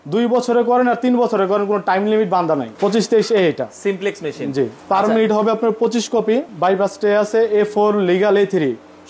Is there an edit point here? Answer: yes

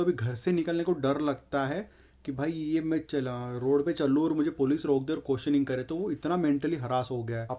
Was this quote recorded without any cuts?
yes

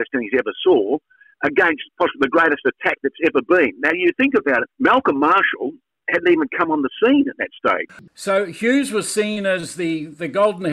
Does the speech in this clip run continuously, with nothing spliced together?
no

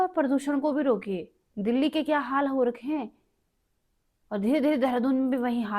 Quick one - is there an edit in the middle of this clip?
no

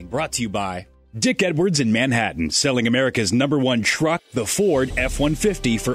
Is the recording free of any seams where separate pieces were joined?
yes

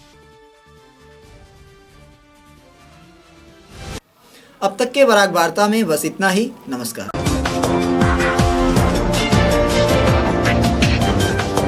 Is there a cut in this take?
no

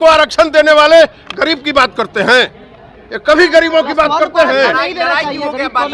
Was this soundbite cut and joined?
no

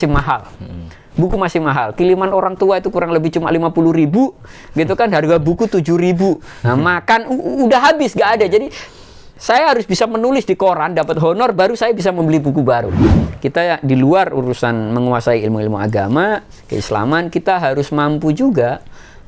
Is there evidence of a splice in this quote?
yes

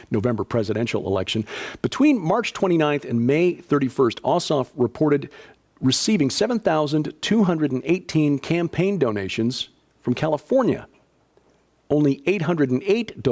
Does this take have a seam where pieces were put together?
yes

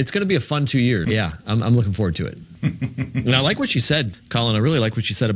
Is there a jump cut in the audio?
yes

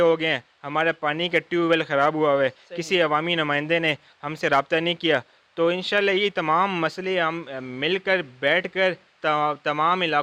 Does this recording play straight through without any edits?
yes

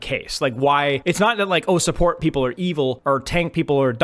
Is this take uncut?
no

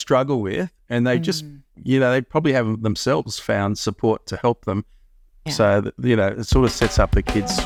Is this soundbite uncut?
yes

